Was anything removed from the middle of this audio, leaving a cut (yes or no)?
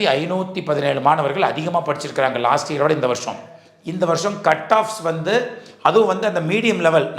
yes